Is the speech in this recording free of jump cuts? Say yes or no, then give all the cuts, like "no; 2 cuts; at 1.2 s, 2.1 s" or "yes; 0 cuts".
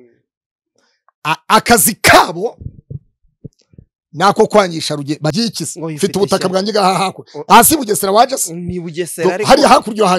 no; 1 cut; at 5.3 s